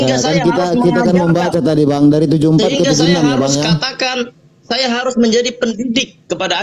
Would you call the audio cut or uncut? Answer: uncut